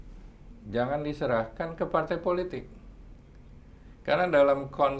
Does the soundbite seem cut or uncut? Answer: uncut